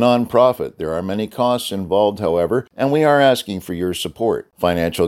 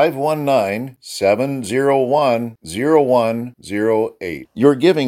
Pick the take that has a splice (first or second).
first